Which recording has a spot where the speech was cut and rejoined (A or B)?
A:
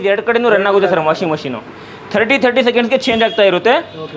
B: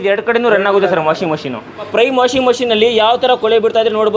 B